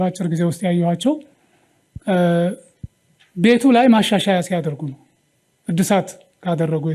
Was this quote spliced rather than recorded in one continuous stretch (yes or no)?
no